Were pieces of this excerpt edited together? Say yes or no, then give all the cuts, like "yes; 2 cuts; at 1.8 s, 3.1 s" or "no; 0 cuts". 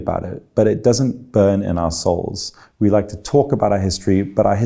no; 0 cuts